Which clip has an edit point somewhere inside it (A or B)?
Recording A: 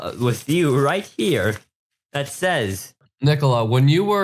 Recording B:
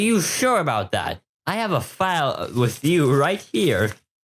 A